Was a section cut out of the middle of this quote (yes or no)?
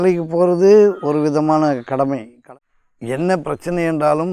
yes